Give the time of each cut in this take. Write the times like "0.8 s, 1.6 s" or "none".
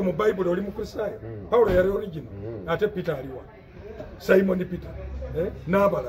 none